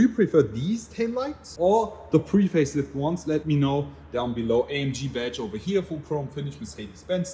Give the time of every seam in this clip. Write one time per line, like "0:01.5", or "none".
none